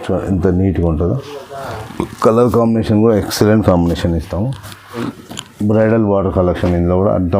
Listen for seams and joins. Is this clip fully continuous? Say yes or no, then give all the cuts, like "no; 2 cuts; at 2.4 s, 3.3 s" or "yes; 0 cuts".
no; 1 cut; at 5.1 s